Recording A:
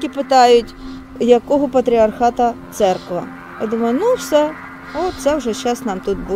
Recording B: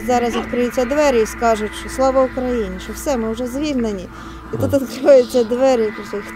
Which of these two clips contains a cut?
A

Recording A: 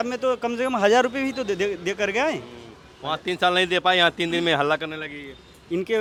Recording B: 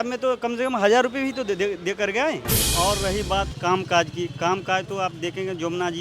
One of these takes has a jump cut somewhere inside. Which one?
B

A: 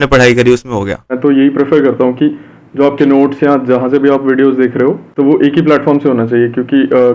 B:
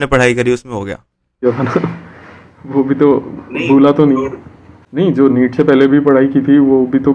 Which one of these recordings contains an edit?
A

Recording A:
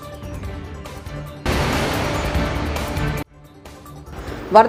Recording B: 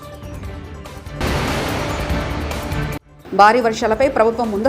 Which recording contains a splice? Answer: B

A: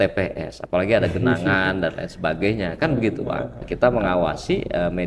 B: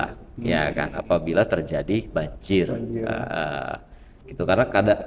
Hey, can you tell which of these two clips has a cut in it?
A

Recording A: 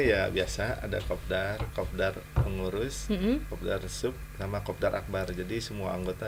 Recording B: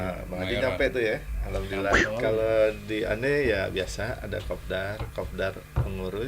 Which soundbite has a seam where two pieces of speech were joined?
B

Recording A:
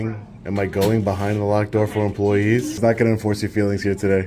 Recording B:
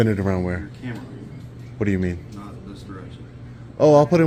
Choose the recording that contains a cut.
A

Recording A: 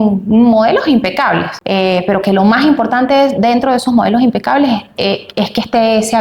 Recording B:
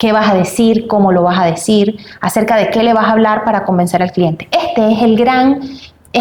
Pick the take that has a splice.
A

